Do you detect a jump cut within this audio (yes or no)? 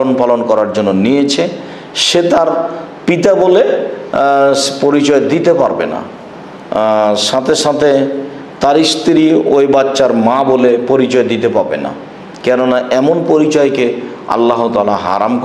no